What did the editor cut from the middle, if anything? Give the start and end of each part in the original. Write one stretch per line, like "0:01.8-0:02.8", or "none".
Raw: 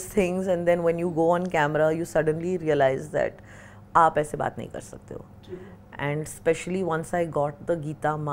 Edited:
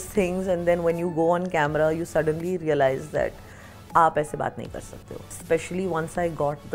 0:05.4-0:06.3